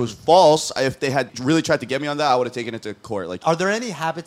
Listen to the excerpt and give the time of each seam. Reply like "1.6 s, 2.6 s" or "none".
1.3 s, 3.4 s

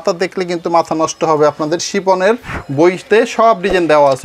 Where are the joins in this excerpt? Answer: 2.6 s

